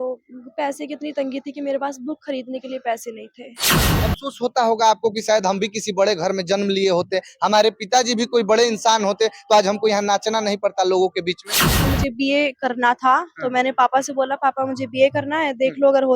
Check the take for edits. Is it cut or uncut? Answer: cut